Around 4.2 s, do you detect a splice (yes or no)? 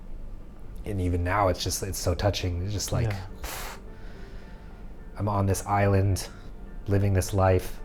no